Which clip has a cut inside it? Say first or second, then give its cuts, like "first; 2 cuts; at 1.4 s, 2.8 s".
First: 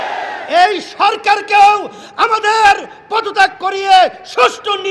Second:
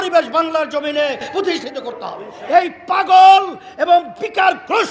second; 1 cut; at 2.3 s